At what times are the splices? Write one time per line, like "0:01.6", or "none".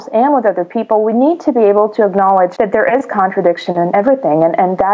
0:02.5
0:03.9